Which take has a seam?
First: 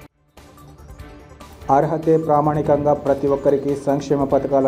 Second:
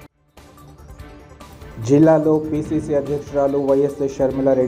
second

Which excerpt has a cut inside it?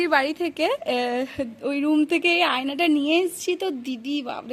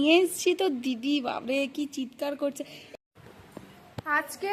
second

